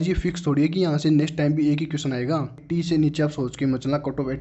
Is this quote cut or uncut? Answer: cut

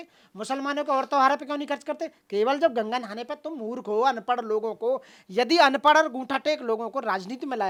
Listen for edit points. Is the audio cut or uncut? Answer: uncut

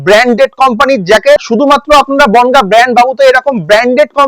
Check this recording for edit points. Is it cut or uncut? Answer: cut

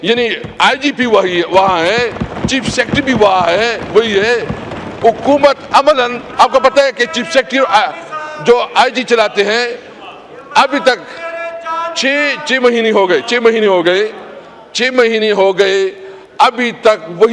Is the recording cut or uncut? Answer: uncut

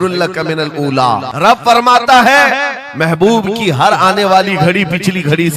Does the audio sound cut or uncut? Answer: cut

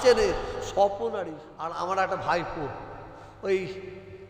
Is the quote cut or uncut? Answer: cut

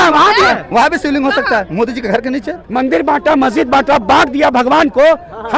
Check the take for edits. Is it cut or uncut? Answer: cut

